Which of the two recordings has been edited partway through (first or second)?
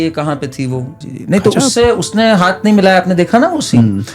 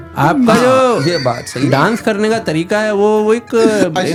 first